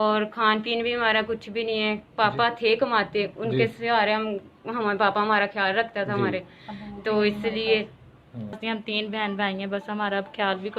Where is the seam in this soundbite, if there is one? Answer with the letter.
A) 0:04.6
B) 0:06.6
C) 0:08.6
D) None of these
C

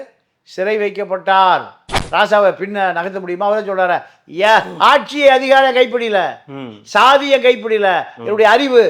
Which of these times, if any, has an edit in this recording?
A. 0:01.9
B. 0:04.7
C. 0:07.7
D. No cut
A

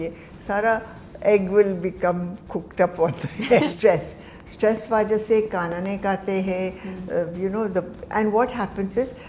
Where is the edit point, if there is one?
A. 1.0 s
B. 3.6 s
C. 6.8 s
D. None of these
B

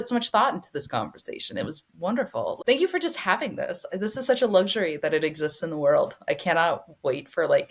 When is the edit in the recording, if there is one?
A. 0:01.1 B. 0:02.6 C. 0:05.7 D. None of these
B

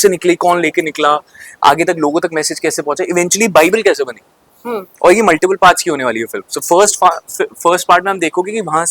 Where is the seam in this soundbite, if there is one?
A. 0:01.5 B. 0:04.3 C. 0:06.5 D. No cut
D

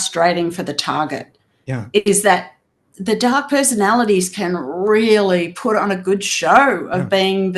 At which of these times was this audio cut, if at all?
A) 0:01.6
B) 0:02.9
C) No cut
B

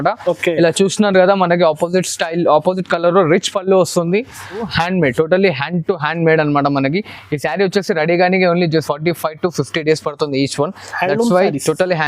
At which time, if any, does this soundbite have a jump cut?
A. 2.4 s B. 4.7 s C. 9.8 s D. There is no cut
B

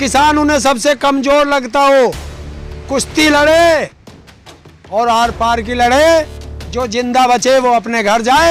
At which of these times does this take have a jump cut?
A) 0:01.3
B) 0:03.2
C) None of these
C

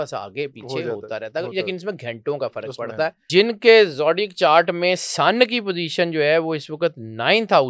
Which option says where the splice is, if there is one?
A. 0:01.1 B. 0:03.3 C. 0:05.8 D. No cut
B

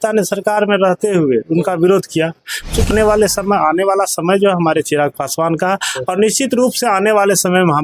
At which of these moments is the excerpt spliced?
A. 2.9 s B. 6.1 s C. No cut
A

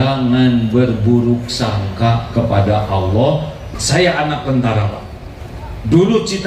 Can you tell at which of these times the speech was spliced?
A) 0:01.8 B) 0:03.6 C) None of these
B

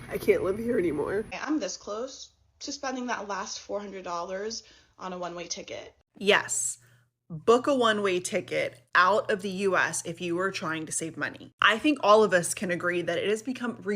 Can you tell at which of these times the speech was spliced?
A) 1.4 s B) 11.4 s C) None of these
A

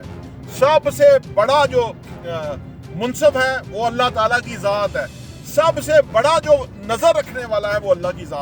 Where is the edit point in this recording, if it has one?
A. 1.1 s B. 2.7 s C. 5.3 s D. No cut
D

